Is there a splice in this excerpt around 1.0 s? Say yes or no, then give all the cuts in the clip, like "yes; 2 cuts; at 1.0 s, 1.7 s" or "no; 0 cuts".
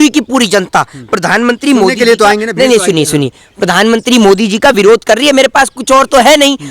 no; 0 cuts